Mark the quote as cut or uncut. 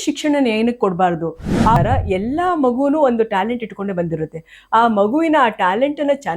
cut